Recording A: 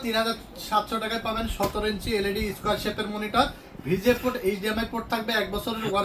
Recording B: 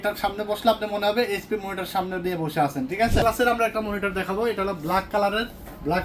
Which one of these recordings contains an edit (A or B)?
B